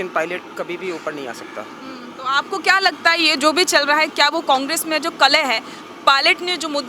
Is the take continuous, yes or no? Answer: yes